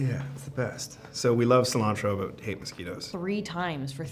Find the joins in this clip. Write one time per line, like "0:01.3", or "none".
0:03.1